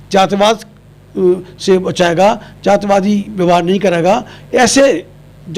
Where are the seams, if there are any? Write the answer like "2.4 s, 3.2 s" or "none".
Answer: none